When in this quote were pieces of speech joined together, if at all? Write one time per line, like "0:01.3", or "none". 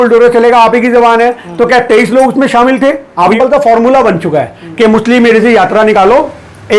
0:03.3